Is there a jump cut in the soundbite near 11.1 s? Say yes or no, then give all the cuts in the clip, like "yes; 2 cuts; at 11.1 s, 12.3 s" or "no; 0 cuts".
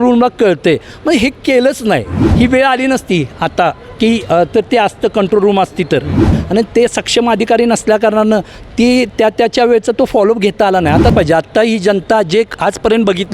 yes; 3 cuts; at 2.2 s, 6.3 s, 11.1 s